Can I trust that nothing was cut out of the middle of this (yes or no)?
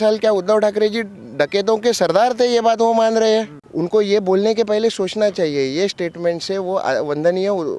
no